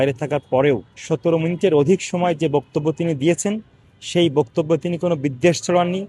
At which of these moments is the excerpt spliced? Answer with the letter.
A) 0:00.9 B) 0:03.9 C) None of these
A